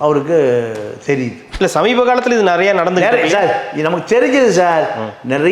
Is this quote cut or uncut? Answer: cut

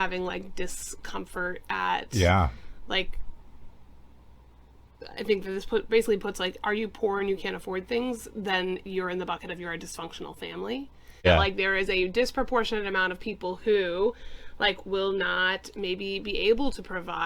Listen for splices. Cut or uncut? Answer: cut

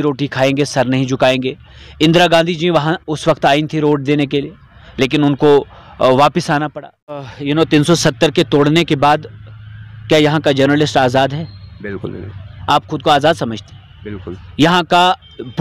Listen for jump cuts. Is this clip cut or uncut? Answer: cut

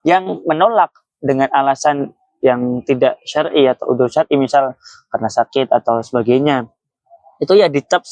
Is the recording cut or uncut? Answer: uncut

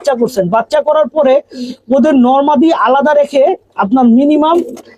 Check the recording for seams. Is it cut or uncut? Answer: uncut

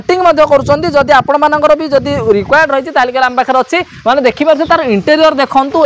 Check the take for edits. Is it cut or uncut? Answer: uncut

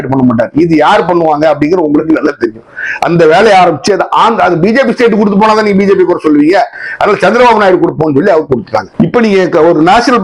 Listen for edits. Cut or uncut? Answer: cut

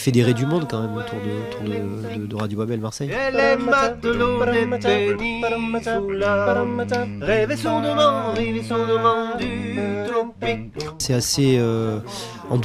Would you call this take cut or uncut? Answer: uncut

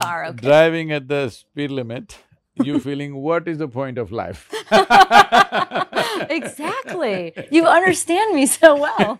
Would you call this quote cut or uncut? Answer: uncut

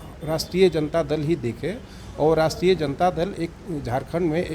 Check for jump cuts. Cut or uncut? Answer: uncut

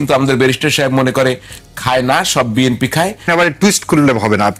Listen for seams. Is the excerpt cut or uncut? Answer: cut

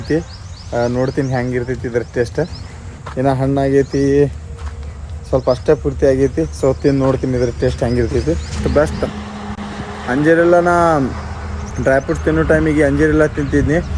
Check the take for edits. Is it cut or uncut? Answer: uncut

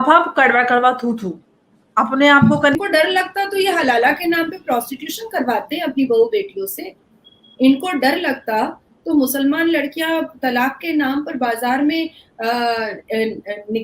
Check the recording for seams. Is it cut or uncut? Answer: cut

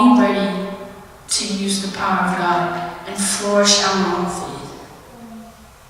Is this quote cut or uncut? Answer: uncut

